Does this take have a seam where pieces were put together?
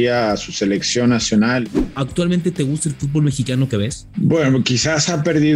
yes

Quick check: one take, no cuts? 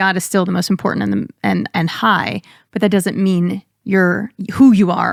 yes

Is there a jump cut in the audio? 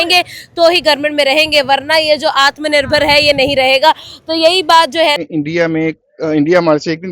yes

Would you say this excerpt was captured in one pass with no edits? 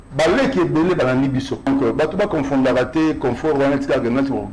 no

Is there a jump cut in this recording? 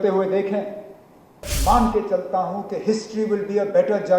yes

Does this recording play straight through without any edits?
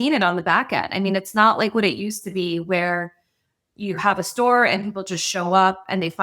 yes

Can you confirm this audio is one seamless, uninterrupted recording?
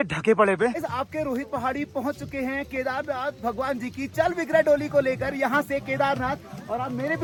yes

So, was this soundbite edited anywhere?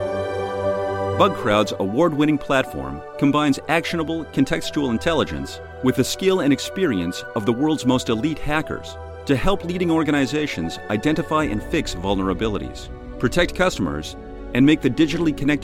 yes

